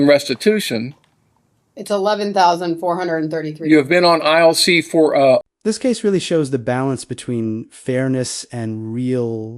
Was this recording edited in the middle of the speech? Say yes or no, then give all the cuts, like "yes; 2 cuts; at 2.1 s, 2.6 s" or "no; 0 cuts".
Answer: no; 0 cuts